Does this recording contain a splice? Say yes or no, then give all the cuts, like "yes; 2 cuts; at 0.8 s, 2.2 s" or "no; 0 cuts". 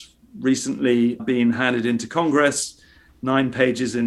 yes; 1 cut; at 1.2 s